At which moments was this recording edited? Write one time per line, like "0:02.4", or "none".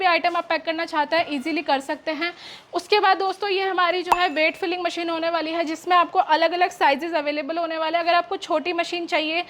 none